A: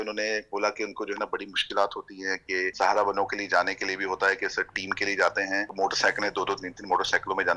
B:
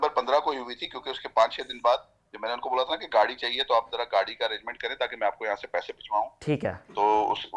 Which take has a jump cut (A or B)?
A